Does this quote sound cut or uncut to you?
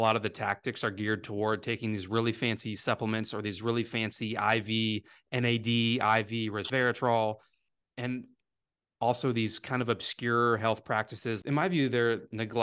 cut